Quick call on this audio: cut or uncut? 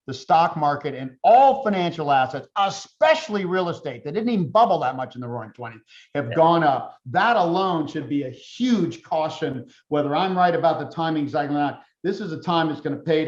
uncut